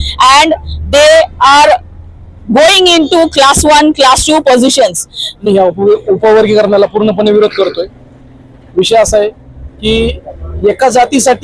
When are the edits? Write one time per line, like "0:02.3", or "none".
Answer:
0:05.4